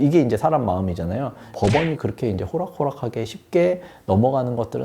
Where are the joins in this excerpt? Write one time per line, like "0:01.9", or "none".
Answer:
0:01.4